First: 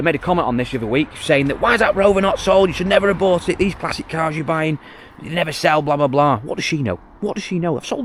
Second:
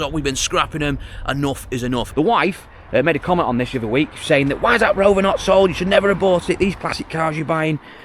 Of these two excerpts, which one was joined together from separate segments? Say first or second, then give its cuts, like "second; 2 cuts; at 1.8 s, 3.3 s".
second; 1 cut; at 2.1 s